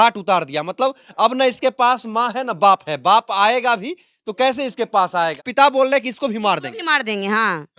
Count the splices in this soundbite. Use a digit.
1